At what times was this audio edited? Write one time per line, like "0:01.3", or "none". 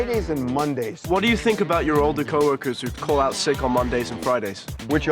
0:01.0
0:02.9